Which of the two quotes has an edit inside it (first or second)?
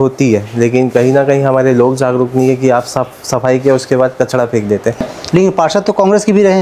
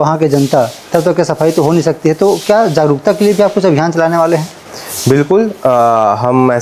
first